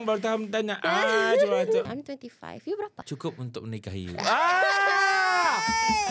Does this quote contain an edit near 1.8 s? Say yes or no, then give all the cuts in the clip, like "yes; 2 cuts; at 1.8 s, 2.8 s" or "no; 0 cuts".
yes; 2 cuts; at 1.8 s, 3.0 s